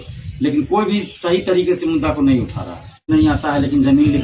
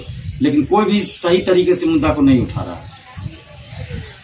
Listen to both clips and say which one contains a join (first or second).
first